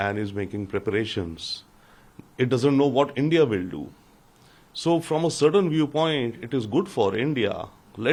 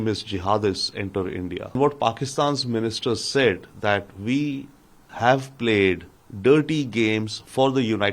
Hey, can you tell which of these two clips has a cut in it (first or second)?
second